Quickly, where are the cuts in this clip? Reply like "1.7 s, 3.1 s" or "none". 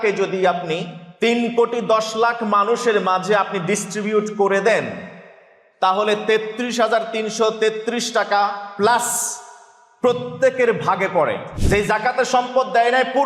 1.0 s, 11.5 s